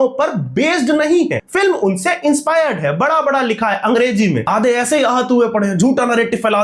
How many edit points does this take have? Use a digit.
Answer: 2